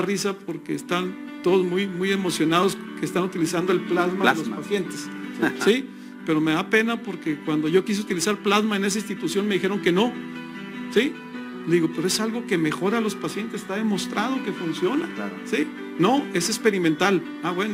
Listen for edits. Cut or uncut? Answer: uncut